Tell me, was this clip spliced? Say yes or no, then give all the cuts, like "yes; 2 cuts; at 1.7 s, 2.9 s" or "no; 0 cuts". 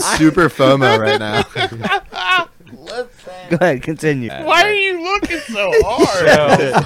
yes; 1 cut; at 4.3 s